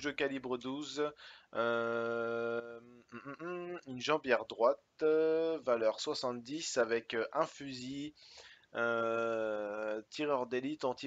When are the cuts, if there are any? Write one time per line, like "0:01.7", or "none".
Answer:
none